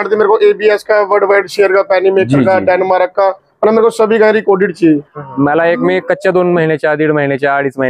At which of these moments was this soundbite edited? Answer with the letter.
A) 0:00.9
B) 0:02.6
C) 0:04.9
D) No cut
C